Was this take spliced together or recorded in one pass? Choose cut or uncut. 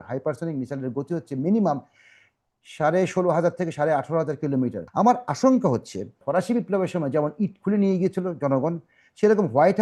cut